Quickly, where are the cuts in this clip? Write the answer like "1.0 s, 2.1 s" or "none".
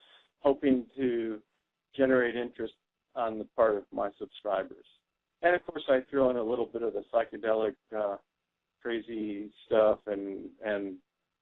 4.5 s